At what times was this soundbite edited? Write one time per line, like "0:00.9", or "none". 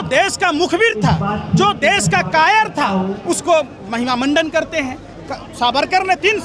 none

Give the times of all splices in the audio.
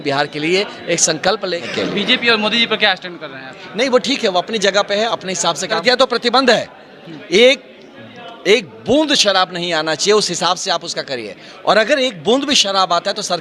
0:01.6
0:05.8

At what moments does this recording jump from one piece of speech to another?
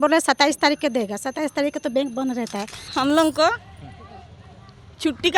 0:02.8

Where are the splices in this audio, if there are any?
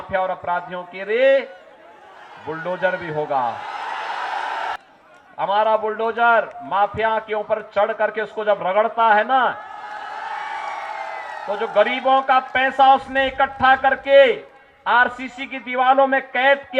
0:04.8

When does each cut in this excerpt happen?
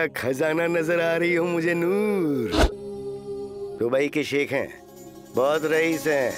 0:02.8

